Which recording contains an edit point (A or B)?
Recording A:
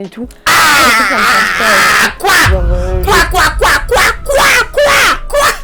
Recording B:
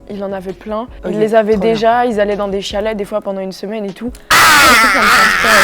B